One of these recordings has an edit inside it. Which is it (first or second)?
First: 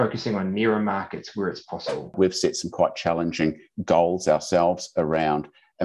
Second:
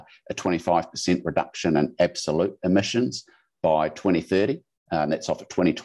first